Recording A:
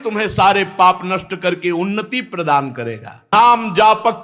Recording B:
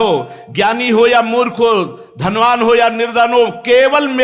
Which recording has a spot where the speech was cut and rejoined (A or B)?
A